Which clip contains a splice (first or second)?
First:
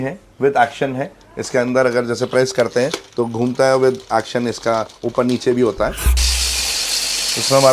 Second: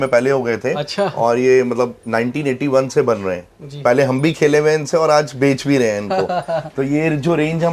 first